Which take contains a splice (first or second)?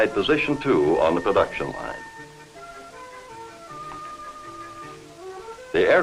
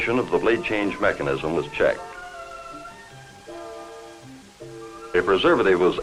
second